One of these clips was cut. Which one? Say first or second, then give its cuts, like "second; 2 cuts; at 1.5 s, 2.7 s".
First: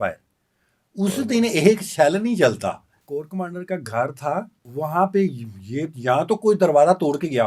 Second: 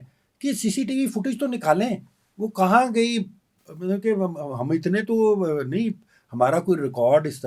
first; 2 cuts; at 2.9 s, 4.6 s